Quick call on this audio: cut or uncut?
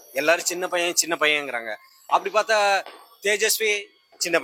uncut